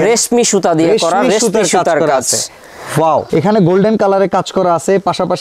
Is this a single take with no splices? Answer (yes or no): no